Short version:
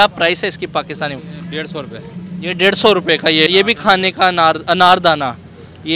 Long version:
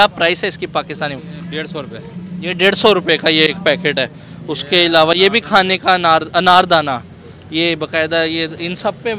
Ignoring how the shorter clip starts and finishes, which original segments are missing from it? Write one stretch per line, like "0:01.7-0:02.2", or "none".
0:03.5-0:05.2